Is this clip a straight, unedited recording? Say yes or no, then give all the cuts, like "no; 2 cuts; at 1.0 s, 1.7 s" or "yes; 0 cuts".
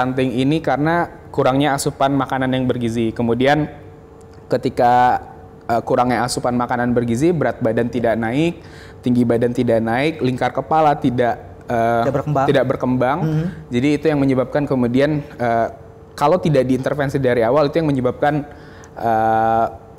yes; 0 cuts